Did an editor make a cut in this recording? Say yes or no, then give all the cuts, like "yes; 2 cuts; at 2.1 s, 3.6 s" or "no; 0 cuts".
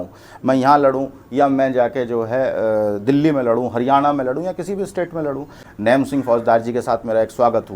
yes; 1 cut; at 5.6 s